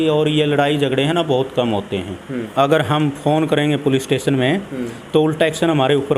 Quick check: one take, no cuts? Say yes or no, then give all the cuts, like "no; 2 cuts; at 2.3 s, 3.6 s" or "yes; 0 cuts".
no; 1 cut; at 2.4 s